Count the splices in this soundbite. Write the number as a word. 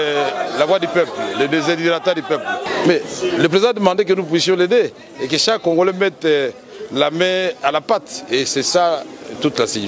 one